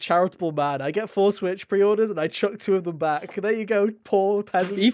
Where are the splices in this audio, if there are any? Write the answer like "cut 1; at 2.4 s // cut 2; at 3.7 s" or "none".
none